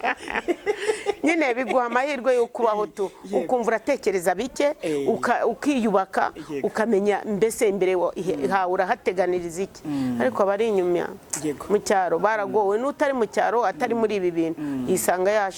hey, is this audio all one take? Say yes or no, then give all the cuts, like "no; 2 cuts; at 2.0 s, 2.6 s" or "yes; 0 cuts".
yes; 0 cuts